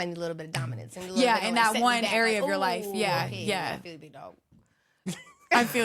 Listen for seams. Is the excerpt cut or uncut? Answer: uncut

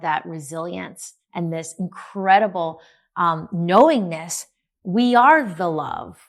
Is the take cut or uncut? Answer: uncut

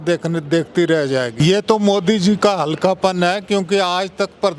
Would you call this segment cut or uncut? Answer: cut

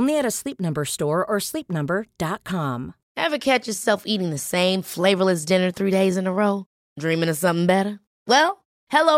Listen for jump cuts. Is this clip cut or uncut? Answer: cut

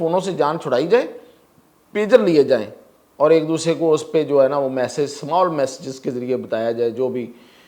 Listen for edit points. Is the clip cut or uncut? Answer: uncut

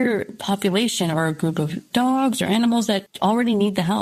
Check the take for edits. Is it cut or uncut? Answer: cut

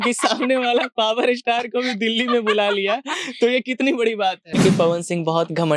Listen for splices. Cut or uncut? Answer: cut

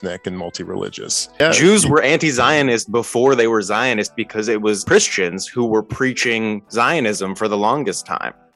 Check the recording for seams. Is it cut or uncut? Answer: cut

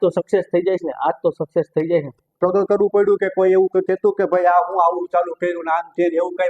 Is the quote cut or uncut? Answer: cut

